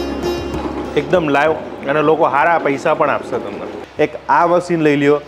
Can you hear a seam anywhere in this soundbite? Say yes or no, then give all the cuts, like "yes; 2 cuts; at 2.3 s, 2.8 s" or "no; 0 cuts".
yes; 1 cut; at 3.8 s